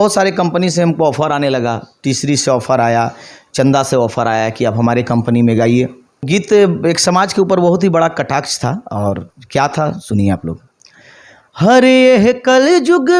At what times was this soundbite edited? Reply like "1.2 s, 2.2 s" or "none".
6.2 s